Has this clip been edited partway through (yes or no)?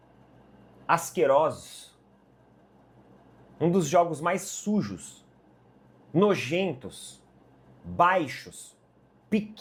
no